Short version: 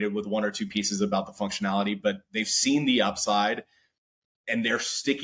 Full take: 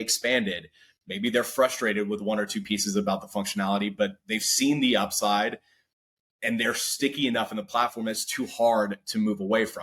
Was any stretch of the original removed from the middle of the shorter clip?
no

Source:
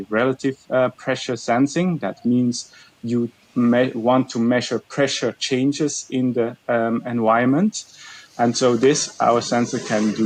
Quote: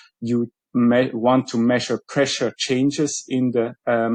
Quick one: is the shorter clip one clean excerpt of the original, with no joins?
yes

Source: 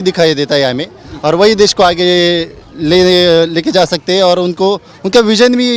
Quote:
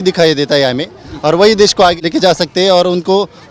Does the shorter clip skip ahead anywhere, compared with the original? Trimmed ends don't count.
yes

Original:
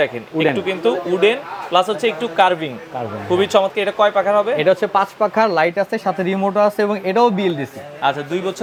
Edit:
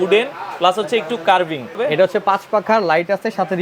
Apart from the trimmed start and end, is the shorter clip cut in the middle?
yes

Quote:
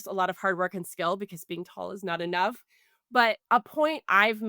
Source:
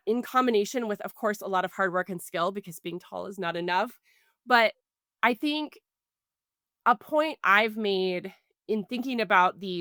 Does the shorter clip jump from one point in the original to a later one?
yes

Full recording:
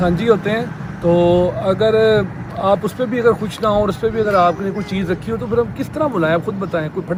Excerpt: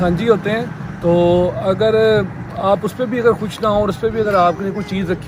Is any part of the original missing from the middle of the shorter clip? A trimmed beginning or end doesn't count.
no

